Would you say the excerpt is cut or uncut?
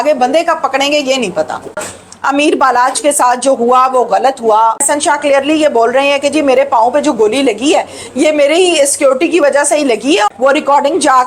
cut